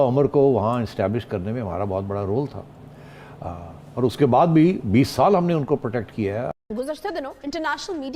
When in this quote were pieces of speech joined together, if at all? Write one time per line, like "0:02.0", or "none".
0:06.5